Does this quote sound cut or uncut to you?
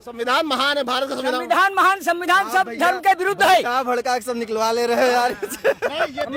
uncut